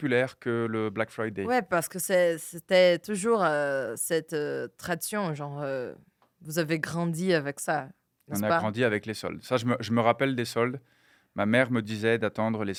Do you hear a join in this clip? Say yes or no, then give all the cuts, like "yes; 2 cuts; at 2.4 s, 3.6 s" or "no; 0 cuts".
no; 0 cuts